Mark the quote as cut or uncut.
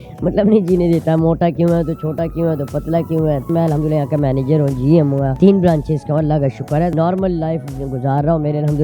cut